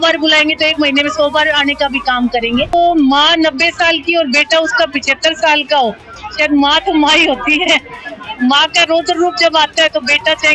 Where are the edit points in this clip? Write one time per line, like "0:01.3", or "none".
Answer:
0:02.7